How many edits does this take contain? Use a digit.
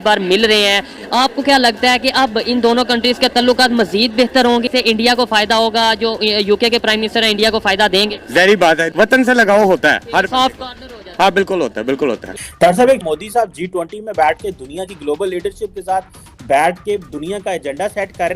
2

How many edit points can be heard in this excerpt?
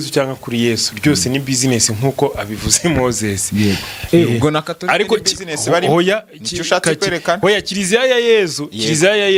0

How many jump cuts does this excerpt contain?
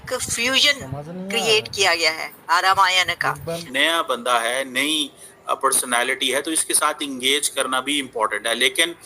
1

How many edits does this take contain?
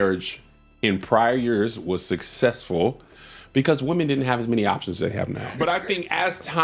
1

